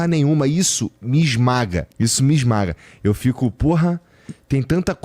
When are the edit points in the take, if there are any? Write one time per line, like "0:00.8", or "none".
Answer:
0:01.9